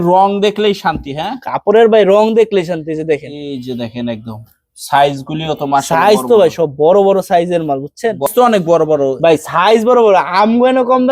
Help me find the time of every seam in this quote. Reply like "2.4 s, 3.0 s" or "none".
8.2 s